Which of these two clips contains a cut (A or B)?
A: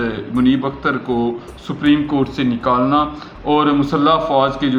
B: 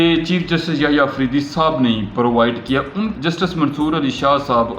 B